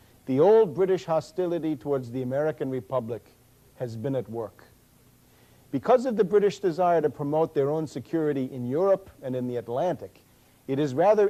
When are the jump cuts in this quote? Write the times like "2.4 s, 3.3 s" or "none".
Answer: none